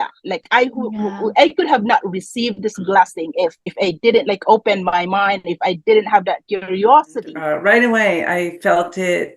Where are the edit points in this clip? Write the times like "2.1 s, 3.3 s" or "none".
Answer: 3.7 s, 7.3 s